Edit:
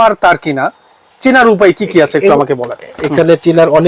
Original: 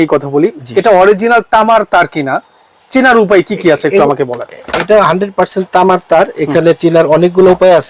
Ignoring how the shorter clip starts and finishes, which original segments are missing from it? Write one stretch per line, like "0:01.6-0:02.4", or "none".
0:04.7-0:06.4